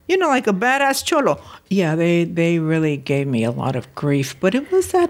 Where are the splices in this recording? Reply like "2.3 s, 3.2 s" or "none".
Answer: 1.6 s